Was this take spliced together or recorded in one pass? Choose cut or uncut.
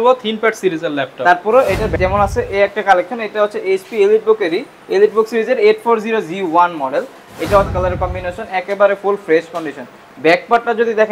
cut